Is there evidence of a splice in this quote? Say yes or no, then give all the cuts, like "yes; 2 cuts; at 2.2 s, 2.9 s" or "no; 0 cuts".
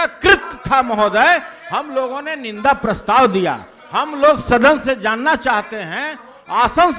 no; 0 cuts